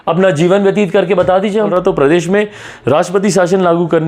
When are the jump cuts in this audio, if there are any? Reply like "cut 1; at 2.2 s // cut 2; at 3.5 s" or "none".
cut 1; at 1.7 s